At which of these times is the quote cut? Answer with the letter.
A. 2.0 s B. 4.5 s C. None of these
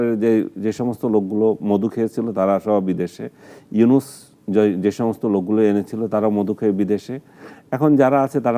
C